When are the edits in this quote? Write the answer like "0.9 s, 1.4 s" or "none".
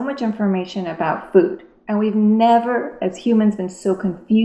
none

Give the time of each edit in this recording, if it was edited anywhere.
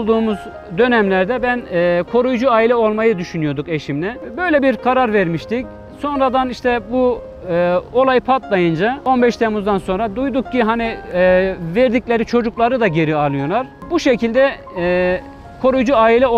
4.2 s, 9.0 s, 13.9 s

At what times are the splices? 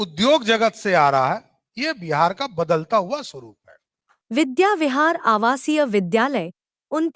none

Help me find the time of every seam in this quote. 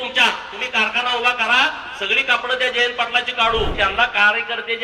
3.7 s

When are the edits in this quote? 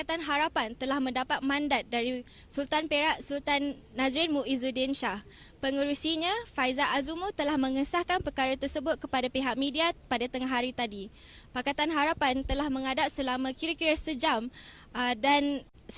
6.2 s

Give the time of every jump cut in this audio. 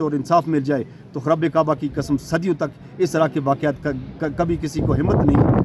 none

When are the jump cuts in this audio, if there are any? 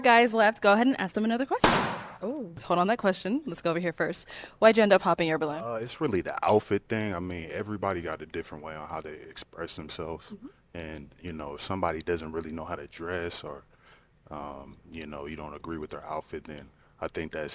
2.6 s

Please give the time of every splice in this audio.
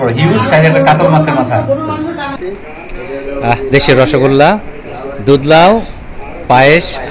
2.3 s

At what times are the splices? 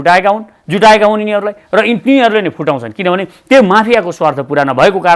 none

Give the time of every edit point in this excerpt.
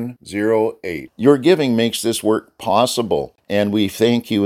3.4 s

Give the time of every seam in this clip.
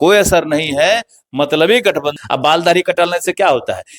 2.1 s

